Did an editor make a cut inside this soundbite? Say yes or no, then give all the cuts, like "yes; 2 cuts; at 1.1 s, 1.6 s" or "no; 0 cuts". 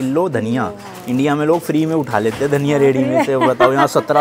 no; 0 cuts